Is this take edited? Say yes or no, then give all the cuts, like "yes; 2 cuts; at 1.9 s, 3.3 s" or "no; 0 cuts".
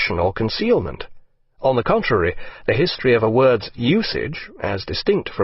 yes; 1 cut; at 2.8 s